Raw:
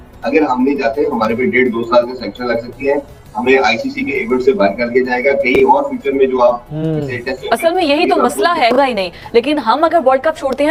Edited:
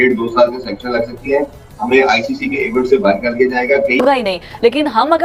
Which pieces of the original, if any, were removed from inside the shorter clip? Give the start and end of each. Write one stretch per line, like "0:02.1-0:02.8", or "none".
0:05.5-0:08.7